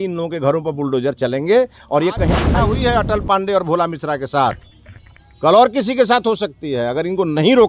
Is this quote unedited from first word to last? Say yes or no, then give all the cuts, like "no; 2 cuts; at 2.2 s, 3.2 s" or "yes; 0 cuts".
no; 1 cut; at 2.5 s